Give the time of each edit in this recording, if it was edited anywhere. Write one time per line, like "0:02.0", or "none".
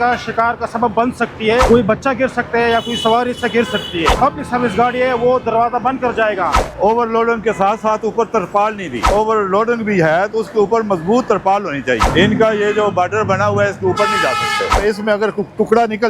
0:01.7
0:04.1
0:06.7
0:09.1
0:12.1
0:14.8